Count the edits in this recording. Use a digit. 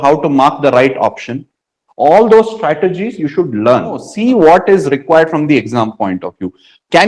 1